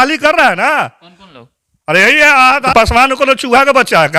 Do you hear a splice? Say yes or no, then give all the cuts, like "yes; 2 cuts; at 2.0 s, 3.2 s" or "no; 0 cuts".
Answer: yes; 1 cut; at 2.7 s